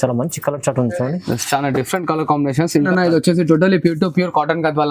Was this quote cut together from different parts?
yes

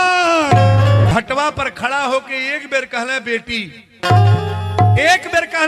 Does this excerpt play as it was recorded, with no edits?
no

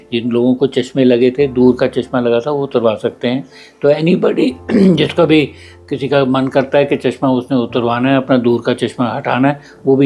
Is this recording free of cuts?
yes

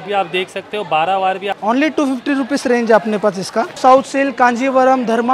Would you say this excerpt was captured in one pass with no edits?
no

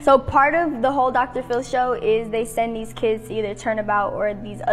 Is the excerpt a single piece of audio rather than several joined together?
no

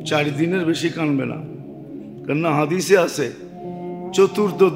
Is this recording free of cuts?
yes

